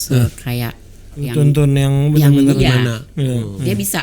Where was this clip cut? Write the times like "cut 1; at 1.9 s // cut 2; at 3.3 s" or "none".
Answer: cut 1; at 1.2 s // cut 2; at 2.6 s

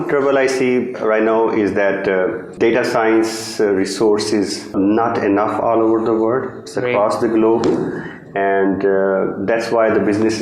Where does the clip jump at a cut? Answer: cut 1; at 2.5 s // cut 2; at 4.7 s

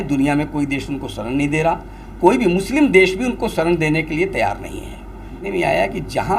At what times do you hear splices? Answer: cut 1; at 5.4 s

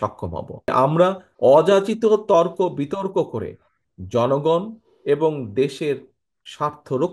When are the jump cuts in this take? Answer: cut 1; at 0.7 s // cut 2; at 1.3 s

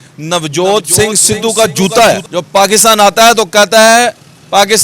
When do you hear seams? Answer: cut 1; at 2.2 s

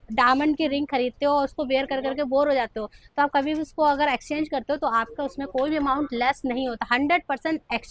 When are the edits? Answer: none

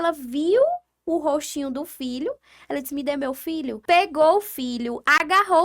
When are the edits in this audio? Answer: cut 1; at 3.8 s

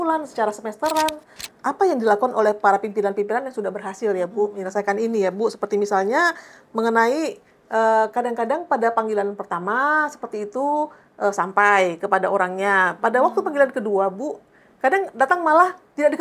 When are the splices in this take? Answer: cut 1; at 1.5 s

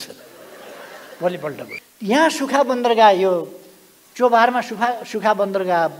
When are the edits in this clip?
cut 1; at 1.8 s

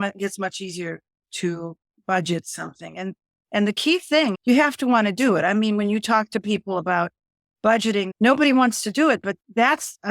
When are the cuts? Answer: cut 1; at 4.4 s // cut 2; at 8.1 s // cut 3; at 9.3 s

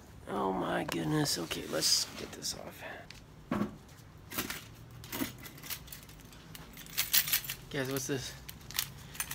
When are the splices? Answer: cut 1; at 3.1 s

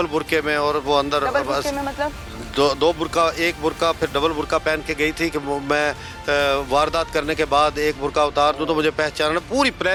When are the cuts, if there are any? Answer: none

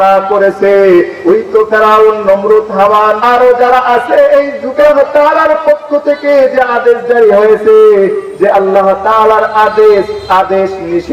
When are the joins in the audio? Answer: cut 1; at 3.2 s // cut 2; at 4.9 s

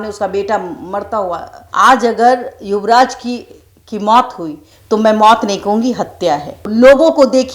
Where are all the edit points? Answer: cut 1; at 1.6 s // cut 2; at 6.6 s

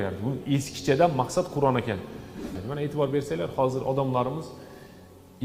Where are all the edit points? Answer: cut 1; at 2.5 s

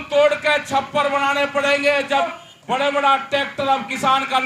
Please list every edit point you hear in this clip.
cut 1; at 2.3 s

